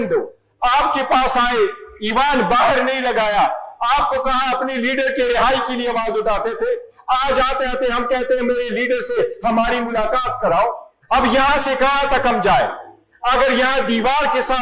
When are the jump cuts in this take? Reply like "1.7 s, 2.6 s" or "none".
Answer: 10.9 s